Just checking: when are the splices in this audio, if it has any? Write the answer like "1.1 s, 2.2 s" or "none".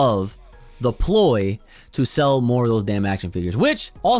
none